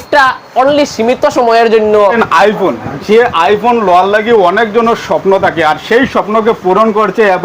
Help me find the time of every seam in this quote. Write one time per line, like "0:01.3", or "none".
0:02.2